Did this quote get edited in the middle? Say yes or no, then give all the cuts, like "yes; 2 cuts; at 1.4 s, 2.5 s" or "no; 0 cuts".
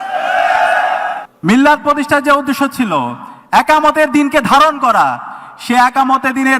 yes; 1 cut; at 1.2 s